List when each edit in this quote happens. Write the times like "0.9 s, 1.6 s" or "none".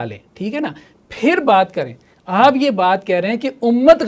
none